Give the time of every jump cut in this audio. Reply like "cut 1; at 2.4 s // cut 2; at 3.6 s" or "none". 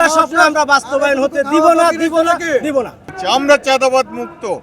cut 1; at 3.1 s